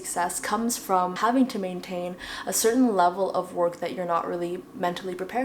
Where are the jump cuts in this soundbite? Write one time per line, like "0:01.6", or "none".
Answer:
0:01.2